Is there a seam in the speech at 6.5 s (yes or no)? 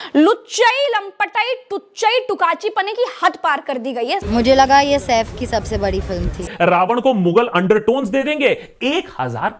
yes